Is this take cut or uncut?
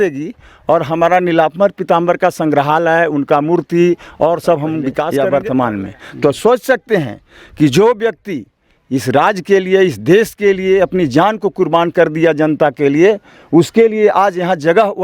cut